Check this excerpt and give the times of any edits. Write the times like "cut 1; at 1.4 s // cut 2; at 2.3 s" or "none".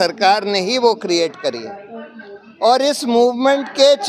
none